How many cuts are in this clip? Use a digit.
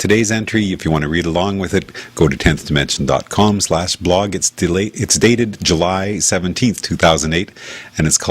1